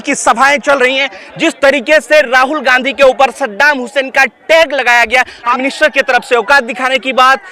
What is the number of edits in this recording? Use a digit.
1